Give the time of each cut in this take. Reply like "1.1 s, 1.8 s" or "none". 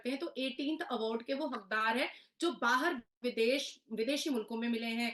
none